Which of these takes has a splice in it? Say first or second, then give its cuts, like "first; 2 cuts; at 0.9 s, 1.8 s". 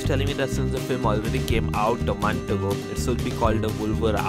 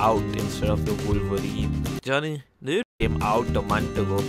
second; 1 cut; at 2.9 s